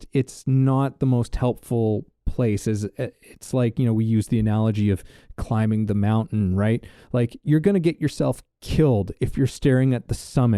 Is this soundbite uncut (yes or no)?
yes